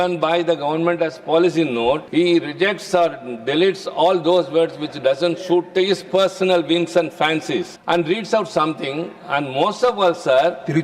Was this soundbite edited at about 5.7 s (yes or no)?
no